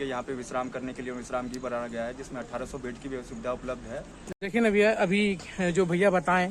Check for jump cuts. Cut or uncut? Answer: cut